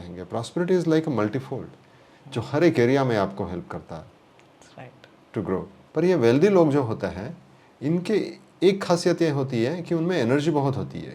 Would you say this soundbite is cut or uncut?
cut